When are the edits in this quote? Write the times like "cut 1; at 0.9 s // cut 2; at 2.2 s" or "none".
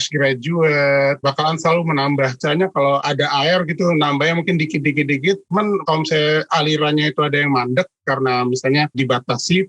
cut 1; at 2.4 s